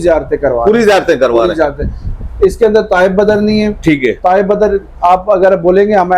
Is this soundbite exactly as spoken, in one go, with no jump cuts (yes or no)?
yes